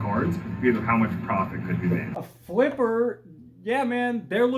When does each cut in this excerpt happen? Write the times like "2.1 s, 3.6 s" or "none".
2.1 s